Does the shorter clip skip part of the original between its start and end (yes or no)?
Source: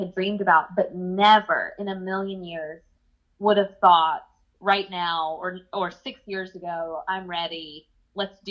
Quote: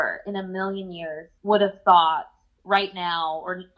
yes